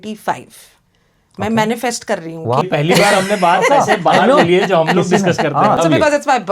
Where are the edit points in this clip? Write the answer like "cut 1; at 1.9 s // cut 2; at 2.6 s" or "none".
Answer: cut 1; at 2.6 s // cut 2; at 5.8 s